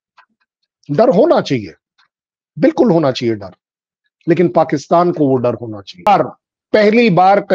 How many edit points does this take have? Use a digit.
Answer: 1